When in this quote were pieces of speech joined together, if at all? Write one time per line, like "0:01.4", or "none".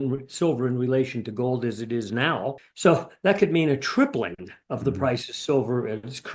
0:02.7